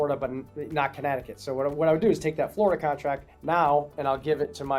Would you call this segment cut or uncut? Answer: uncut